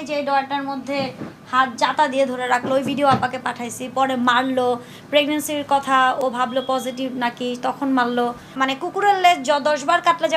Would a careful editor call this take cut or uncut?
cut